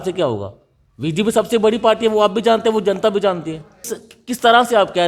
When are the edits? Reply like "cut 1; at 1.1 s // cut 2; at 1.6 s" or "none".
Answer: cut 1; at 4.0 s